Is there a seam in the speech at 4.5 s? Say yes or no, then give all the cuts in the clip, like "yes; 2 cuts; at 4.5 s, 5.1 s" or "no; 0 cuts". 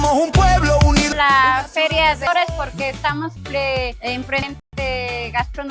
yes; 4 cuts; at 1.2 s, 2.3 s, 3.3 s, 4.5 s